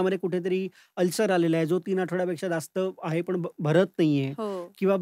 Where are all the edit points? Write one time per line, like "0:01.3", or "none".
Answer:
none